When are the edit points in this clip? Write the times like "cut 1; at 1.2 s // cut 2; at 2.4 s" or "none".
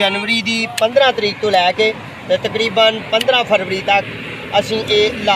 none